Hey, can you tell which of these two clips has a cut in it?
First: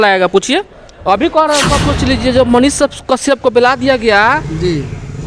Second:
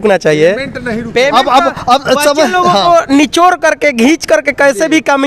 first; 1 cut; at 1.8 s

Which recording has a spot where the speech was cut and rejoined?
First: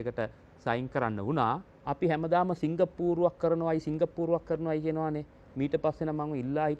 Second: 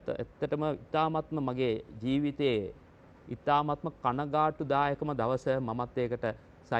first; 1 cut; at 1.7 s

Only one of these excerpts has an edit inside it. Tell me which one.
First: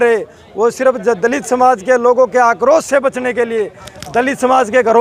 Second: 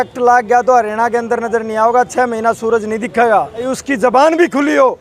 second; 1 cut; at 3.6 s

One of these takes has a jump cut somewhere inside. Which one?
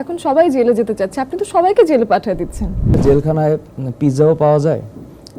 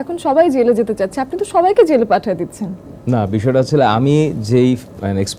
first; 1 cut; at 3.0 s

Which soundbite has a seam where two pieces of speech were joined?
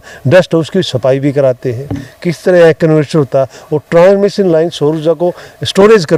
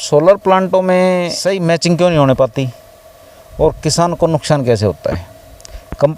second; 1 cut; at 1.4 s

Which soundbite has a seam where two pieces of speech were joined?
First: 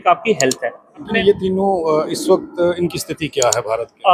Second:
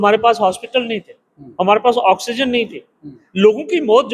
first; 1 cut; at 1.1 s

